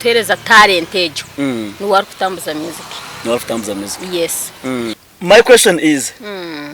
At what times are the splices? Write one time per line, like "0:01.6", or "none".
0:05.0